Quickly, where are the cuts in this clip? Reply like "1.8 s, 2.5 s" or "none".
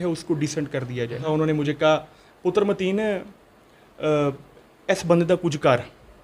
1.2 s